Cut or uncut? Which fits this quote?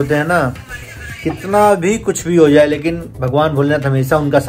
uncut